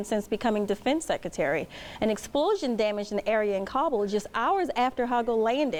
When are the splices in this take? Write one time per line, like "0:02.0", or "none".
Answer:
none